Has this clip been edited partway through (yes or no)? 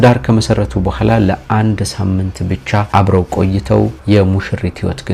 no